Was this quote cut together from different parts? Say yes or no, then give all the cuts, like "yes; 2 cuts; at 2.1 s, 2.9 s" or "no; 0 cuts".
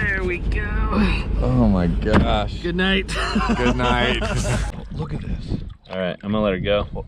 yes; 1 cut; at 4.8 s